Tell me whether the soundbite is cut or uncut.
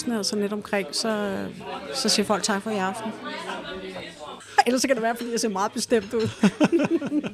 cut